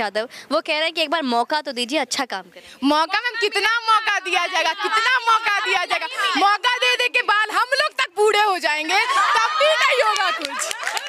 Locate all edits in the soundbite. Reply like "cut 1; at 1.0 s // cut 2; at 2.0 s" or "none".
none